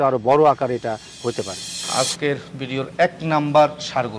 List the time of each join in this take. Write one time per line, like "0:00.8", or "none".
0:01.8